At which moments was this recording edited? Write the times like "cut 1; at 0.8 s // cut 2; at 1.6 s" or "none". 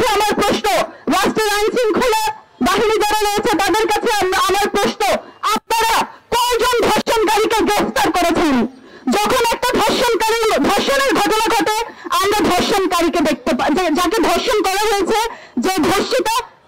none

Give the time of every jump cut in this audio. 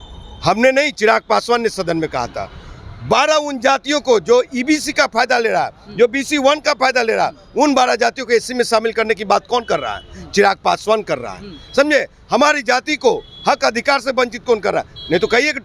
none

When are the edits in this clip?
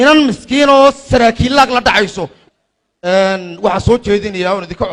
cut 1; at 2.4 s

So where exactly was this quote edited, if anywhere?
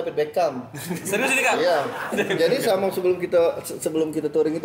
cut 1; at 2.1 s

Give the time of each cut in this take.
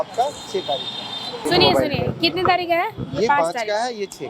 cut 1; at 1.4 s

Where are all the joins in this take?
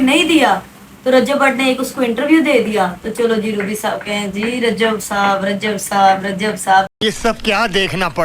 none

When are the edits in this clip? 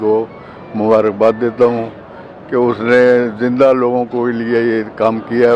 none

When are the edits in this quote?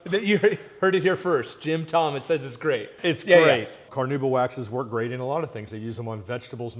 cut 1; at 2.9 s // cut 2; at 3.8 s

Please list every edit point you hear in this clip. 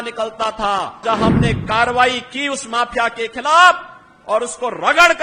cut 1; at 1.0 s

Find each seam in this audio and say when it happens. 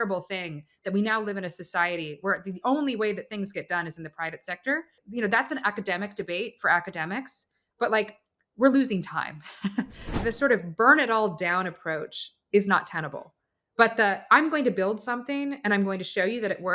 cut 1; at 5.0 s // cut 2; at 10.2 s

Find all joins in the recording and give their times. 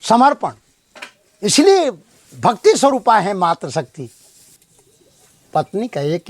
cut 1; at 4.7 s

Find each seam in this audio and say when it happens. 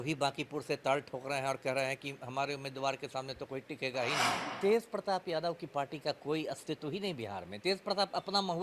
cut 1; at 4.4 s

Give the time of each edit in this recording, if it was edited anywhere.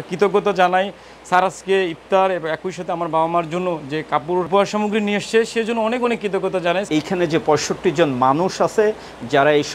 cut 1; at 4.5 s // cut 2; at 6.9 s

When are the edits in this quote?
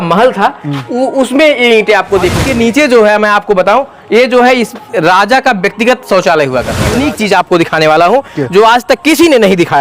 cut 1; at 2.4 s // cut 2; at 6.9 s

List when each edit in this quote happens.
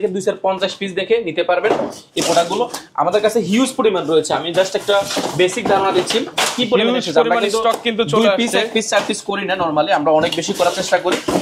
none

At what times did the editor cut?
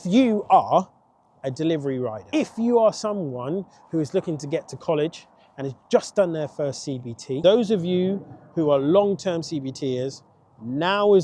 cut 1; at 2.2 s // cut 2; at 7.4 s

